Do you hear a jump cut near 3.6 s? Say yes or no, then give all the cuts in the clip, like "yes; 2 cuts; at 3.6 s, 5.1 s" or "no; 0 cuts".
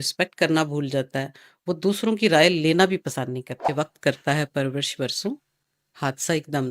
yes; 1 cut; at 3.6 s